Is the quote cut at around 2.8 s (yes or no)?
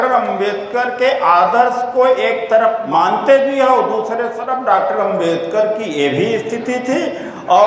yes